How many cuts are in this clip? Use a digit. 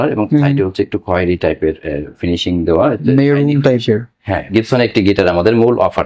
1